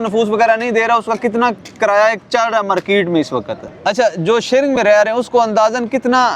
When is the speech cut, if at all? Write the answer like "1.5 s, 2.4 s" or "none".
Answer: 3.6 s